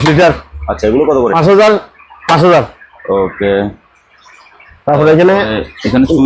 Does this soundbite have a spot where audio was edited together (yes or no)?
no